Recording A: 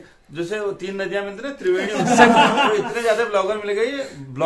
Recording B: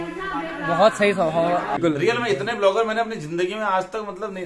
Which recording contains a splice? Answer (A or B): B